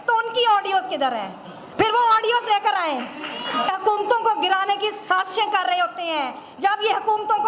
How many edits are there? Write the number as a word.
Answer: one